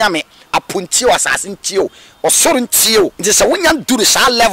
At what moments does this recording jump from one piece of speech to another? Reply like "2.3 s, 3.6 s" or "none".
3.2 s